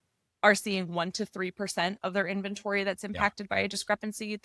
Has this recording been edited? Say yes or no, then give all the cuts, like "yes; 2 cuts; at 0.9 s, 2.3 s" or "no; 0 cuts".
no; 0 cuts